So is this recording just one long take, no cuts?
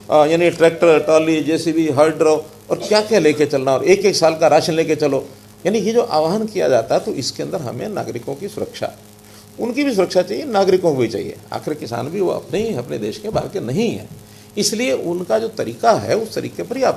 yes; 0 cuts

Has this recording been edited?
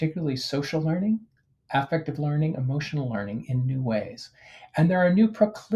no; 0 cuts

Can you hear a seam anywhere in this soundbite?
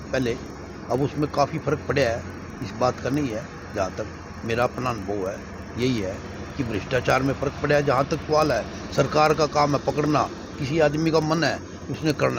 no; 0 cuts

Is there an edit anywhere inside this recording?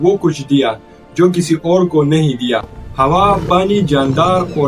yes; 1 cut; at 2.8 s

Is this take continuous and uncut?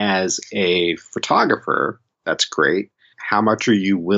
no; 2 cuts; at 2.1 s, 3.1 s

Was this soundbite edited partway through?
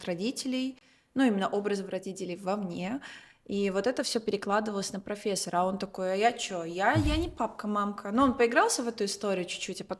no; 0 cuts

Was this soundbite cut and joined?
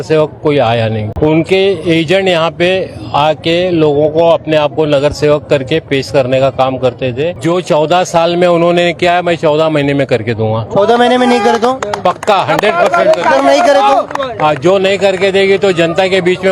yes; 2 cuts; at 1.1 s, 7.3 s

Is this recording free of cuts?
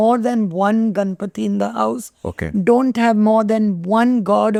yes; 0 cuts

